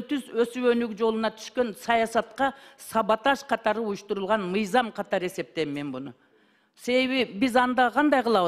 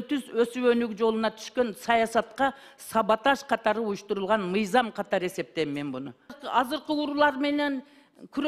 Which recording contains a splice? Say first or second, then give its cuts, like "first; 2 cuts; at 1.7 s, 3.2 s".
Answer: second; 1 cut; at 6.4 s